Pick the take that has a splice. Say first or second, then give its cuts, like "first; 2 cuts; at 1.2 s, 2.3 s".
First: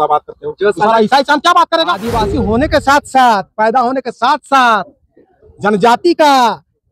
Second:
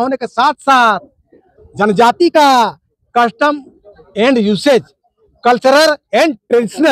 first; 1 cut; at 2.2 s